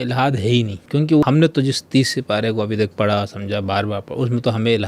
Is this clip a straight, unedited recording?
no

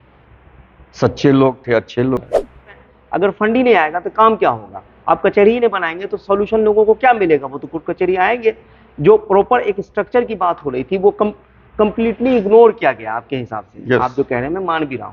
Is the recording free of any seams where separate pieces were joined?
no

